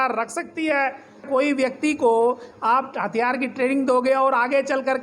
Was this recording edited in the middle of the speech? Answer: yes; 1 cut; at 1.3 s

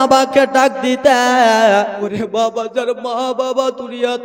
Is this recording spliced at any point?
yes; 1 cut; at 2.0 s

